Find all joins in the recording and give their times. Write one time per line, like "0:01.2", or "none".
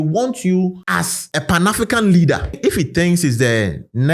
0:02.5